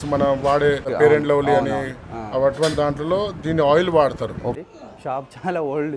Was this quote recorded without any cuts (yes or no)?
no